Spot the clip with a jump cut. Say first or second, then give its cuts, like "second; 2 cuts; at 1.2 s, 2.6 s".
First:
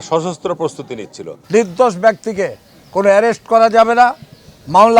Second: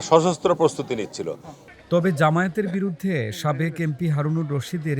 first; 1 cut; at 1.3 s